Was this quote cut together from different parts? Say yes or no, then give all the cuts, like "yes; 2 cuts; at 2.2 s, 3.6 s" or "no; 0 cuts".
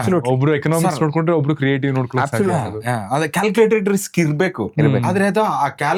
no; 0 cuts